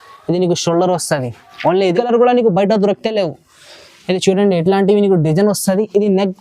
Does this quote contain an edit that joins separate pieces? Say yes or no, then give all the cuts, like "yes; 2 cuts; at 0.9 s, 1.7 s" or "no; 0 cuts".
yes; 1 cut; at 1.9 s